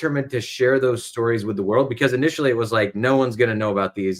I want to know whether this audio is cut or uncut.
uncut